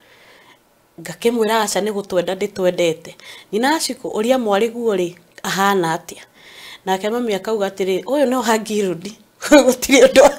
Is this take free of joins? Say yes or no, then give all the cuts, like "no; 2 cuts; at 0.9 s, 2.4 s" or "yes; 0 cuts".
yes; 0 cuts